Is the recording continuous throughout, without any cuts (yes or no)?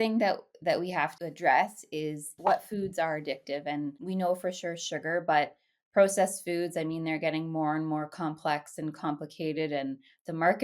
no